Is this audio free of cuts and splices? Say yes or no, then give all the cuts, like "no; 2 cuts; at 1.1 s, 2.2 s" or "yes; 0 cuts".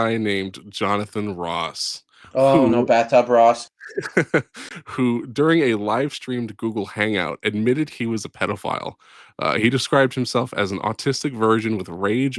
yes; 0 cuts